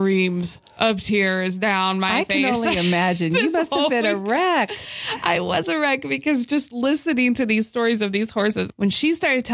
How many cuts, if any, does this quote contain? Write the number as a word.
one